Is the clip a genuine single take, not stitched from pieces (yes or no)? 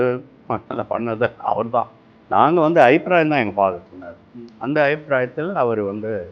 yes